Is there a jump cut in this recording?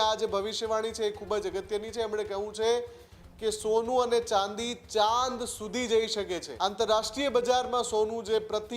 yes; 1 cut; at 6.4 s

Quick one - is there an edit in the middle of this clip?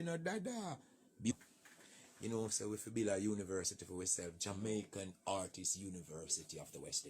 yes; 1 cut; at 1.3 s

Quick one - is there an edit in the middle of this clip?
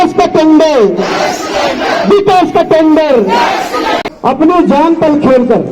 yes; 1 cut; at 4.0 s

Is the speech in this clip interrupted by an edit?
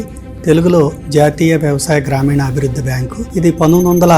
yes; 1 cut; at 3.1 s

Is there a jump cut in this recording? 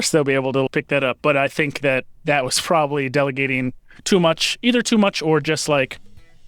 no; 0 cuts

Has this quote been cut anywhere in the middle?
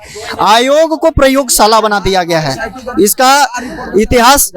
no; 0 cuts

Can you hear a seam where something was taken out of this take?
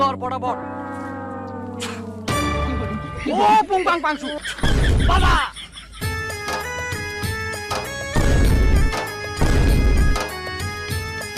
yes; 1 cut; at 6.0 s

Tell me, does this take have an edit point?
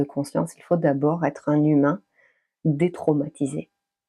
no; 0 cuts

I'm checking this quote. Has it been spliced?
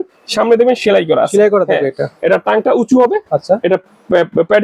no; 0 cuts

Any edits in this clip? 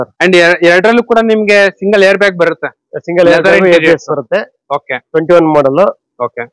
no; 0 cuts

